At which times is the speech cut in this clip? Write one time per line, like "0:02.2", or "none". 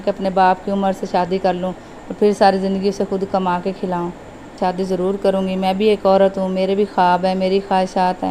0:04.6